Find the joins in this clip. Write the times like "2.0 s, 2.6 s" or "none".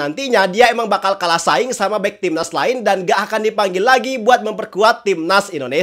none